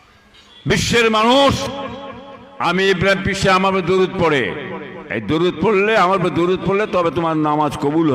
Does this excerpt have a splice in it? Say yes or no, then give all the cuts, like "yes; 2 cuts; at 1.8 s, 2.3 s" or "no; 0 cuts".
yes; 1 cut; at 1.7 s